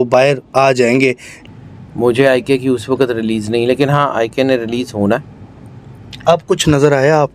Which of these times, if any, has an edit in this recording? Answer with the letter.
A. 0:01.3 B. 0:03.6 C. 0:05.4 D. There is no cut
A